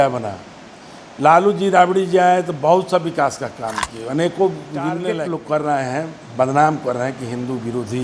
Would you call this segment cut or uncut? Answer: cut